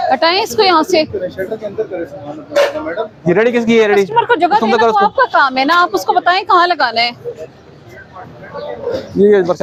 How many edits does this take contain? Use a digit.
0